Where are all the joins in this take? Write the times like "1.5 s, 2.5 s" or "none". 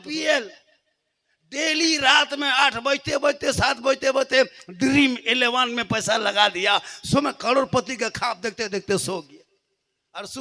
none